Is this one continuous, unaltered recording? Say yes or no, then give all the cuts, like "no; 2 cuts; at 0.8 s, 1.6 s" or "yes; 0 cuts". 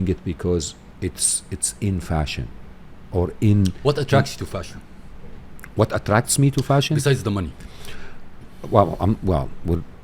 yes; 0 cuts